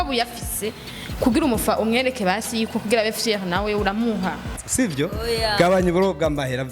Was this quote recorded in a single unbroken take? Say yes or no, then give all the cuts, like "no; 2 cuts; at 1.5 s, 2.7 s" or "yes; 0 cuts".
no; 1 cut; at 4.5 s